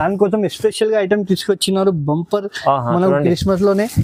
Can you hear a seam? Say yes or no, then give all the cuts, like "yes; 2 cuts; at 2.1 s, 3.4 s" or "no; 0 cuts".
no; 0 cuts